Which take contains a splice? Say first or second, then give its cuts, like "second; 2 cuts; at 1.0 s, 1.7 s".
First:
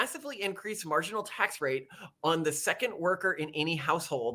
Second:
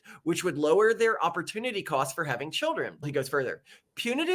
second; 1 cut; at 3.1 s